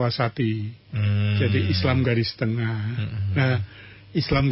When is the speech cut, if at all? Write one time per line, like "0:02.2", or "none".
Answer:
none